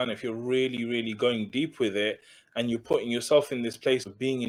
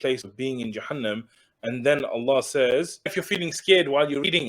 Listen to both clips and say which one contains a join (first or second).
second